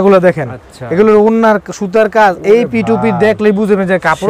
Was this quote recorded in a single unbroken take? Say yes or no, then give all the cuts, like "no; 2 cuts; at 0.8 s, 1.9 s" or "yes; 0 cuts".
yes; 0 cuts